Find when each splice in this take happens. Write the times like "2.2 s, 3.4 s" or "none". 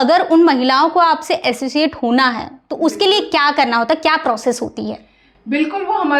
none